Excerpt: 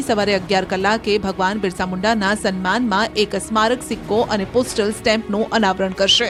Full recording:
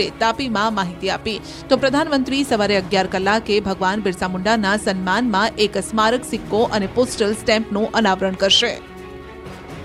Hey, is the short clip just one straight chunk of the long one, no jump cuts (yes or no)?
yes